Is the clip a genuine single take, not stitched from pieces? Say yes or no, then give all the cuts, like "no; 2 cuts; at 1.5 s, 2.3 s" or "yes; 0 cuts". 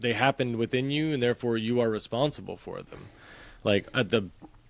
yes; 0 cuts